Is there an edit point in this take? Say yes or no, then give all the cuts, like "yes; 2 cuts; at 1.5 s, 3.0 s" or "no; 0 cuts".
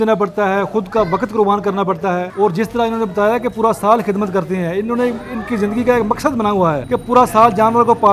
yes; 2 cuts; at 2.3 s, 6.8 s